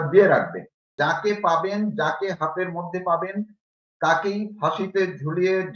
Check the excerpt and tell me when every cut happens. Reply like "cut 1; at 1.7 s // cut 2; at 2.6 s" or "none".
cut 1; at 0.9 s